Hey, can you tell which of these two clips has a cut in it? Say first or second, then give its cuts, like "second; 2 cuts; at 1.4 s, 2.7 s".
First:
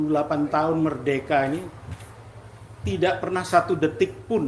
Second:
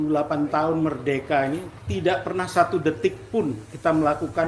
second; 1 cut; at 1.8 s